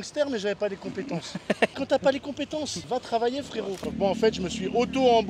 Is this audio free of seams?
no; 3 cuts; at 1.7 s, 2.8 s, 3.8 s

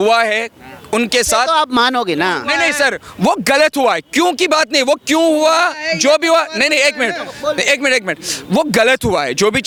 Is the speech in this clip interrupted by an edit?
no; 0 cuts

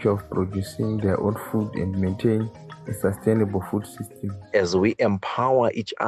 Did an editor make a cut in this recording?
yes; 1 cut; at 4.5 s

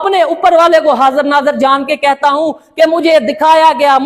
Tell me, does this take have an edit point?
no; 0 cuts

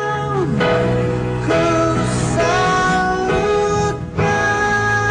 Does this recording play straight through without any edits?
yes; 0 cuts

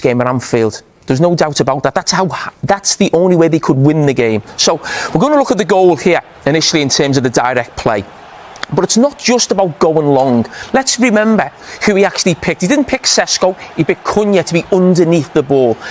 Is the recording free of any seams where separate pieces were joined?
yes; 0 cuts

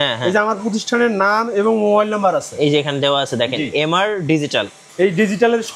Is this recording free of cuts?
no; 1 cut; at 4.8 s

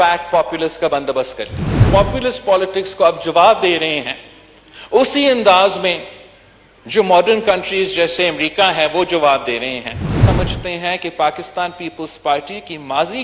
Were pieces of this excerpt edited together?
yes; 2 cuts; at 1.8 s, 10.2 s

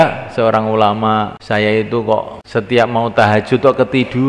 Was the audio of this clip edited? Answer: yes; 2 cuts; at 1.4 s, 2.4 s

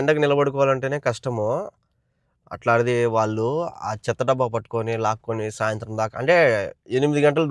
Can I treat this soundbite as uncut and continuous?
yes; 0 cuts

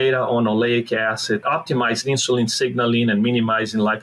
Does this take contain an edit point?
yes; 1 cut; at 1.4 s

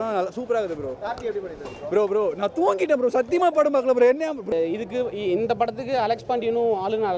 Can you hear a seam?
yes; 1 cut; at 4.5 s

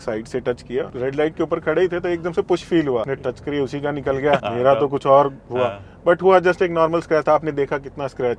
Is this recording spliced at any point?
yes; 3 cuts; at 0.9 s, 3.1 s, 4.5 s

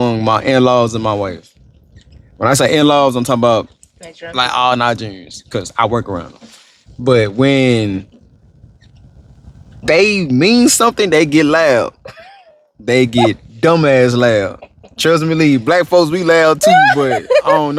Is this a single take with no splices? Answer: yes; 0 cuts

